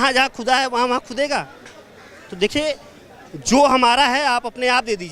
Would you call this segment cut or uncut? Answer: uncut